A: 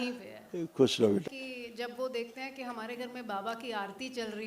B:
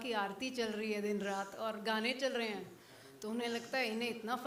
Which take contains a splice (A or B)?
A